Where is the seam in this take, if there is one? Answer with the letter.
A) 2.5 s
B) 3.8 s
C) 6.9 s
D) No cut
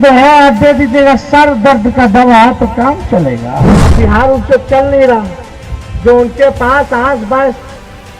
B